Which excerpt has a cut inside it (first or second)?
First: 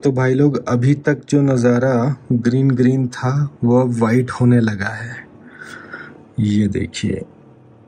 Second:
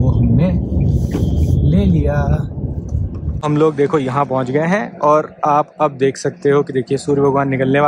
second